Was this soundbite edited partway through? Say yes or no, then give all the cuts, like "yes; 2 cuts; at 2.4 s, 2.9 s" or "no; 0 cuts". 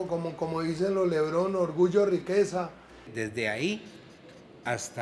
yes; 1 cut; at 3.2 s